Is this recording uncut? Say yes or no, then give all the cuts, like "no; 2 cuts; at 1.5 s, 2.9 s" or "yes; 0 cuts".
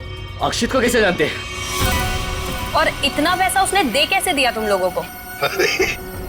yes; 0 cuts